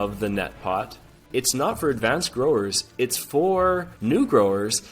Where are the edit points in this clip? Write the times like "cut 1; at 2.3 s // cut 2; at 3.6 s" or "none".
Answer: cut 1; at 1.2 s // cut 2; at 3.9 s